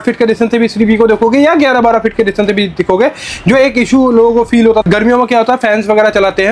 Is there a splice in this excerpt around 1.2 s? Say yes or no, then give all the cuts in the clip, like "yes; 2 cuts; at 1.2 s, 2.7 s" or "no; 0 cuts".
no; 1 cut; at 4.9 s